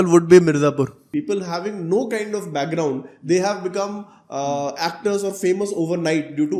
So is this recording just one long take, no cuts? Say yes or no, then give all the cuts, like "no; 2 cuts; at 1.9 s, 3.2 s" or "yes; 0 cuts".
no; 1 cut; at 1.0 s